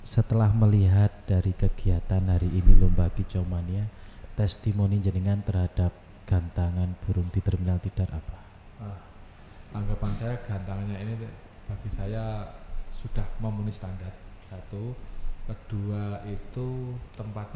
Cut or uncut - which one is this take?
uncut